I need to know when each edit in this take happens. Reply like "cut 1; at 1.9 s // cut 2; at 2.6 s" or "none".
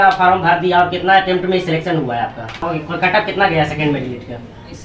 cut 1; at 2.6 s

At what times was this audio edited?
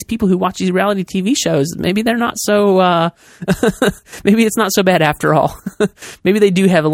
none

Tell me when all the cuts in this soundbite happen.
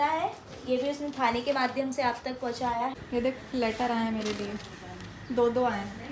cut 1; at 3.0 s

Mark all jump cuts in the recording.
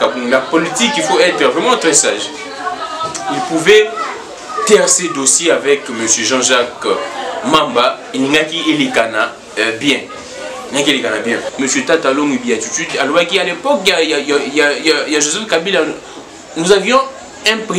cut 1; at 11.5 s

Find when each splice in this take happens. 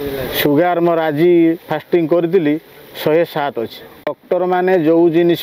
cut 1; at 4.1 s

